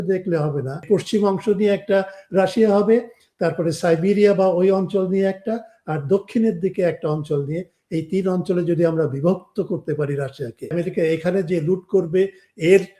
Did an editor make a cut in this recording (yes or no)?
yes